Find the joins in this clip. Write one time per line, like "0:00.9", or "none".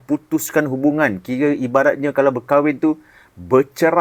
none